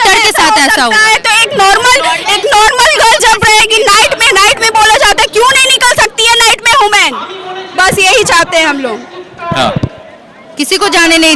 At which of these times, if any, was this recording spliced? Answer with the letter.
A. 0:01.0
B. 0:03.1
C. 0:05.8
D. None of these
D